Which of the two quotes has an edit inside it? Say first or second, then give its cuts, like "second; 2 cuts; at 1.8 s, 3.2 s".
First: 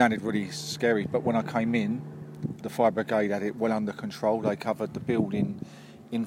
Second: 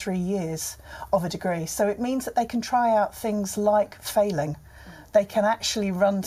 first; 1 cut; at 2.6 s